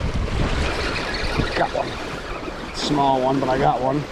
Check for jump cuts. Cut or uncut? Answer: uncut